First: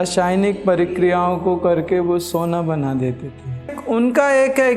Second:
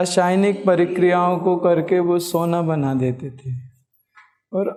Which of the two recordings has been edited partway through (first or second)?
first